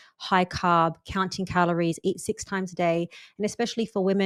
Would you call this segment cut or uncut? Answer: uncut